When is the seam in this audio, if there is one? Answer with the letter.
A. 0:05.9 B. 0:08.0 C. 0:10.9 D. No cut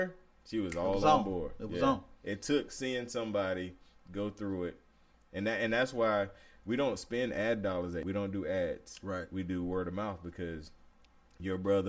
B